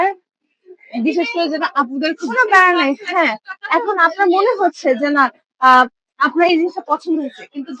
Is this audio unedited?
no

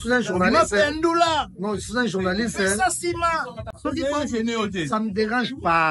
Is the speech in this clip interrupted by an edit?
yes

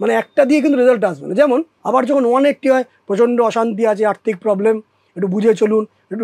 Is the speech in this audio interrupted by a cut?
yes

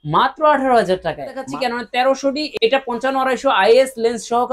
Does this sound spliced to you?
yes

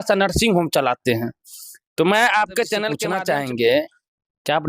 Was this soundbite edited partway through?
yes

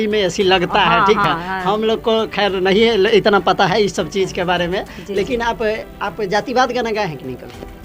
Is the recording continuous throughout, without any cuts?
yes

